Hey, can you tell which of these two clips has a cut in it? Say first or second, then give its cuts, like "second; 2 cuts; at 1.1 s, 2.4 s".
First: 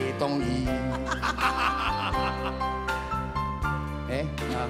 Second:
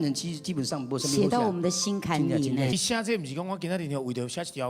second; 1 cut; at 2.7 s